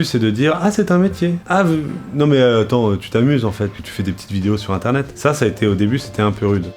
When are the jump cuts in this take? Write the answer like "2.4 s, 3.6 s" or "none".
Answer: 1.4 s, 5.1 s